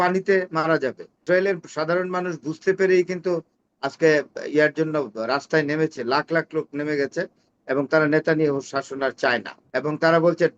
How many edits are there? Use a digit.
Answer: 2